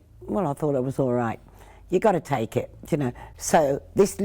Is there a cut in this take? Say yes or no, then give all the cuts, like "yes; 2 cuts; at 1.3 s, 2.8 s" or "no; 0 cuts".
yes; 1 cut; at 3.2 s